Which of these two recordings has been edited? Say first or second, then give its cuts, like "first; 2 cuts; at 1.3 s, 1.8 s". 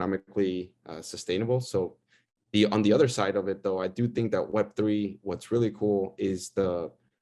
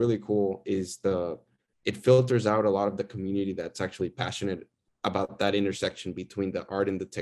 first; 1 cut; at 2.2 s